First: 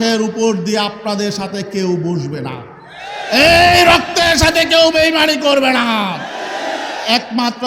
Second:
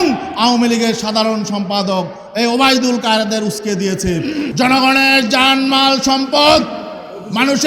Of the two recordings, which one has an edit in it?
second; 1 cut; at 4.5 s

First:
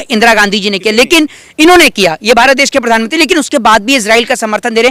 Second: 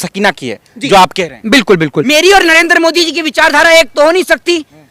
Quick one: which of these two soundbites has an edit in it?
second; 1 cut; at 1.9 s

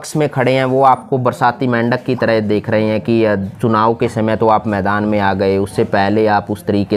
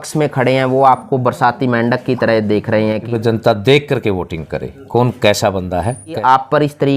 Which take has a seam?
second; 2 cuts; at 3.0 s, 6.2 s

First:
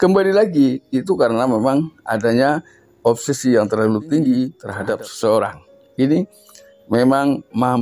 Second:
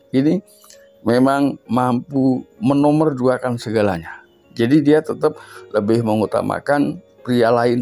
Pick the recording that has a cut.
first; 1 cut; at 4.7 s

